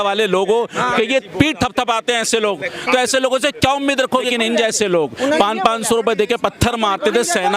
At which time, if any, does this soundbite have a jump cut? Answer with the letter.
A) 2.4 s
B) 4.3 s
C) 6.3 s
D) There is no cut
B